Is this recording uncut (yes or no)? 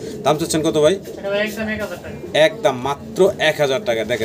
yes